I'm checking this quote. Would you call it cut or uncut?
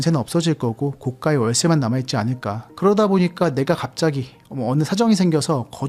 cut